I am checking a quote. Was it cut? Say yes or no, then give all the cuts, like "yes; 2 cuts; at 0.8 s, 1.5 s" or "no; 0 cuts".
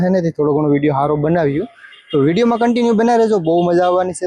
no; 0 cuts